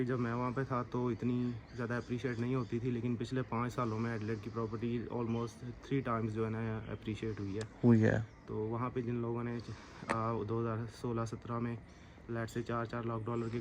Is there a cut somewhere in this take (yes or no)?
no